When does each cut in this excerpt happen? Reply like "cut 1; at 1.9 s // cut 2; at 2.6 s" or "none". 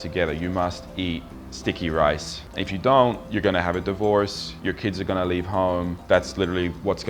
none